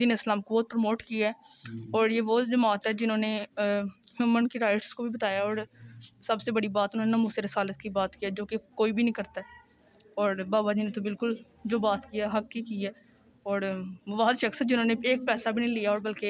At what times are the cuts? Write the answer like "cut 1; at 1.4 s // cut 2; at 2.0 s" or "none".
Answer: none